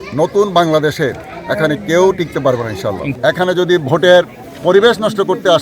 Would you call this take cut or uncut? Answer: cut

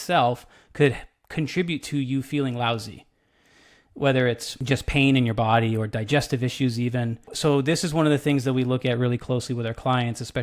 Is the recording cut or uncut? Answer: cut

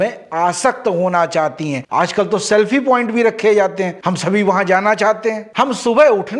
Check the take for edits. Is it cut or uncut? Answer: cut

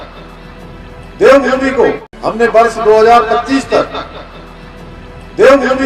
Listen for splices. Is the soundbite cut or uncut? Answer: cut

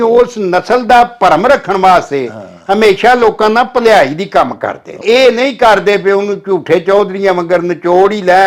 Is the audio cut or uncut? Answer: cut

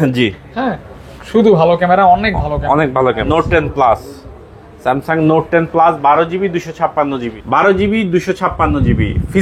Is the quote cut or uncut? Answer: cut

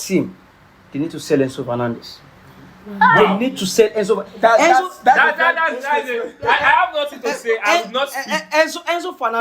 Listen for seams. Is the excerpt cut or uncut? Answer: uncut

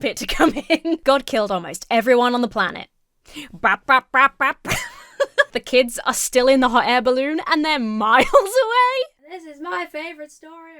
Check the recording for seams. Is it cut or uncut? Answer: cut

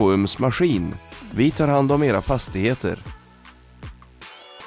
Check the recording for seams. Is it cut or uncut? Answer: uncut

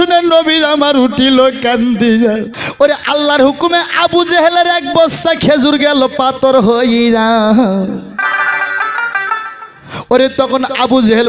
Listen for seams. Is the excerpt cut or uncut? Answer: cut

